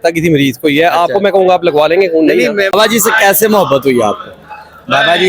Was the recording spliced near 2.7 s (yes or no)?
yes